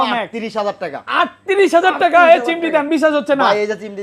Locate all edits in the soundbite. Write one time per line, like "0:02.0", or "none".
none